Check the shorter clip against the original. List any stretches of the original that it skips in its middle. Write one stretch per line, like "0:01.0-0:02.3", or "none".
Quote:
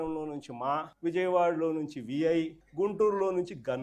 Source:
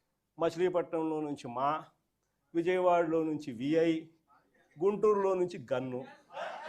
0:01.9-0:02.4
0:04.1-0:04.6